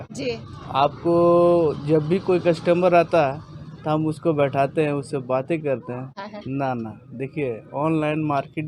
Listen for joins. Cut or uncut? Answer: cut